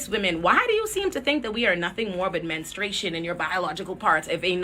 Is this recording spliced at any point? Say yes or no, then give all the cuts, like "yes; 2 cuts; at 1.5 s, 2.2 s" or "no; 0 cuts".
no; 0 cuts